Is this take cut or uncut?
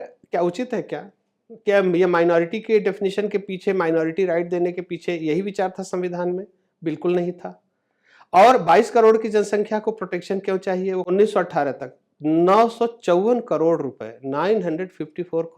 cut